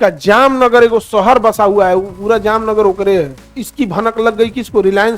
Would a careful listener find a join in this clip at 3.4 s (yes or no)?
yes